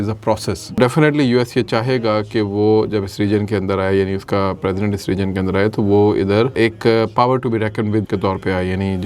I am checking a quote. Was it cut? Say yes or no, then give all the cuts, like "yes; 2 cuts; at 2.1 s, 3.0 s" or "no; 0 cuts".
yes; 3 cuts; at 0.8 s, 6.5 s, 8.1 s